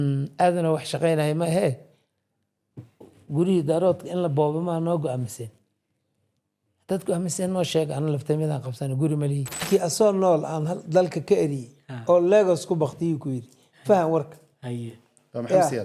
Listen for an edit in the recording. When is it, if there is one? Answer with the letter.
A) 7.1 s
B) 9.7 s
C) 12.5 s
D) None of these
B